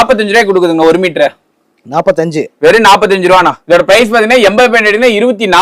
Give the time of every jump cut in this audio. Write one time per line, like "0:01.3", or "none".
0:03.6